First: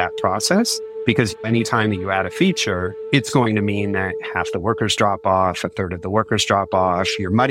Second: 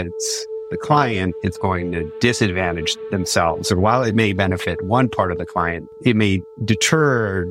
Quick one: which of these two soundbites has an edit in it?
first; 2 cuts; at 1.3 s, 2.9 s

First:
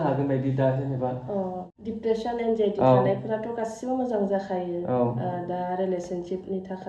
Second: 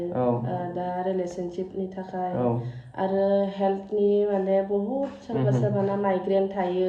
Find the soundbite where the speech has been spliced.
first; 1 cut; at 1.6 s

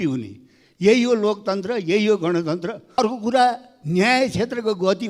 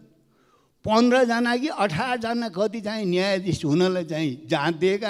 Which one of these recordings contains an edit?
first; 1 cut; at 3.0 s

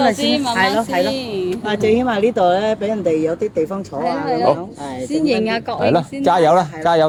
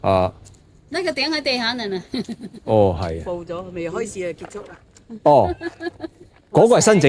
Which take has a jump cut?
second; 1 cut; at 3.2 s

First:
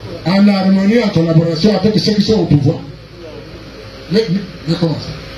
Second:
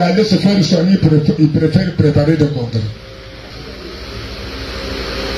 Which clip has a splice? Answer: second; 1 cut; at 3.5 s

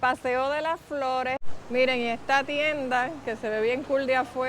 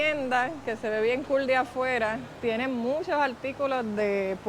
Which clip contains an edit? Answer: first; 1 cut; at 1.4 s

